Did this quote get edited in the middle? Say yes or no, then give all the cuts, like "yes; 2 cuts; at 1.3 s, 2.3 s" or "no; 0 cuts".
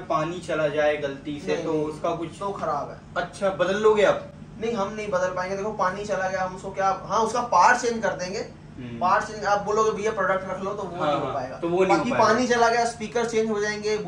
no; 0 cuts